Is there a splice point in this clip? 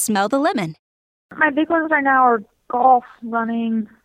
yes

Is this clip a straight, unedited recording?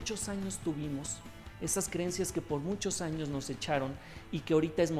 yes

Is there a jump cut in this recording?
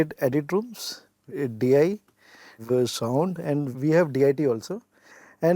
yes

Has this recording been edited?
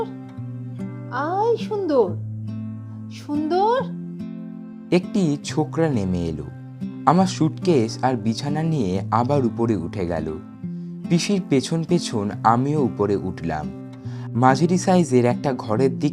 yes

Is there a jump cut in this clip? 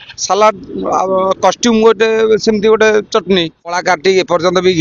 yes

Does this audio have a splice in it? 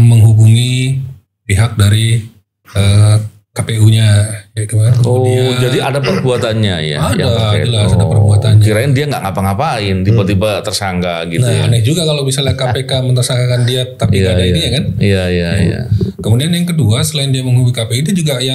no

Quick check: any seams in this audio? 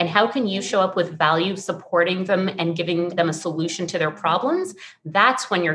no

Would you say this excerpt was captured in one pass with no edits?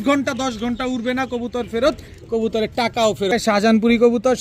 no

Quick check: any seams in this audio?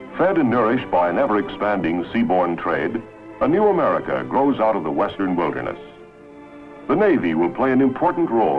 no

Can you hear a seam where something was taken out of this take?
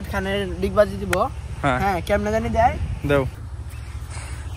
yes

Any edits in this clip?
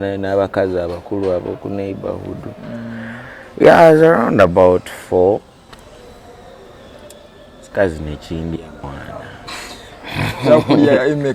no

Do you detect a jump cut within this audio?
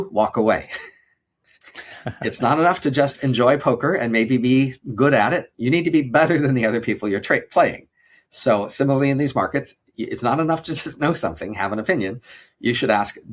no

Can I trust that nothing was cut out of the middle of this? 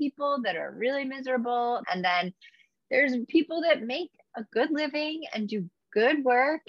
no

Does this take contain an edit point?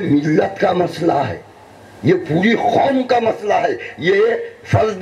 no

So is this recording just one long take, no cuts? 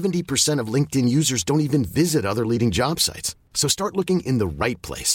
yes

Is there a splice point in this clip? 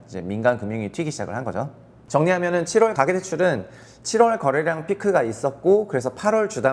no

